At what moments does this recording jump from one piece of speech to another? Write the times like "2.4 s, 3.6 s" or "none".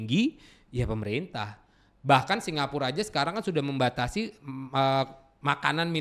none